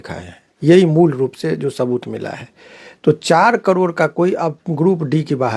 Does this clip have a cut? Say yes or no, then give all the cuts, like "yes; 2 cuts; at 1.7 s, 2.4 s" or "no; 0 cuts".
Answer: no; 0 cuts